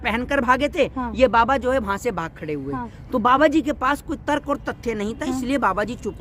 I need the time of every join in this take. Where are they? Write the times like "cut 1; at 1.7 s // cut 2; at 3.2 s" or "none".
none